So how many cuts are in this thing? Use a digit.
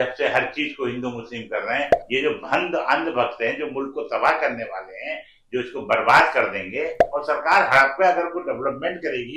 2